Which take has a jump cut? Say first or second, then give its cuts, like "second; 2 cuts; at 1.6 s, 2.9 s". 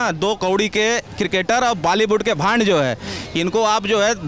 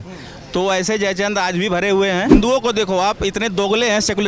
second; 1 cut; at 2.3 s